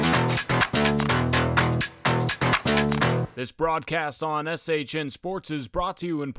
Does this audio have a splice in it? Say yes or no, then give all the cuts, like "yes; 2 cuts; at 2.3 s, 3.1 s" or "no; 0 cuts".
yes; 1 cut; at 3.4 s